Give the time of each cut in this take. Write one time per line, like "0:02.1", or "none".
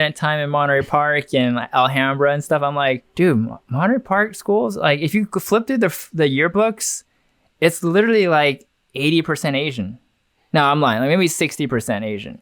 none